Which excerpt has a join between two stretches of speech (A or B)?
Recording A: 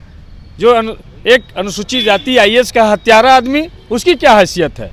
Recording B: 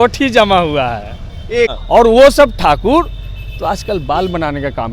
B